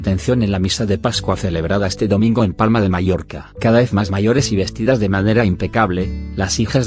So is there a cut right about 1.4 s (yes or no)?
yes